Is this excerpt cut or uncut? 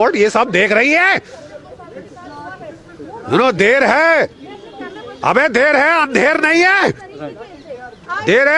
uncut